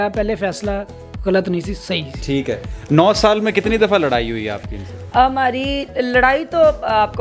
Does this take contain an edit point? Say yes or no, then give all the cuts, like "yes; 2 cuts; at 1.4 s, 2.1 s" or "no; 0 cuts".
no; 0 cuts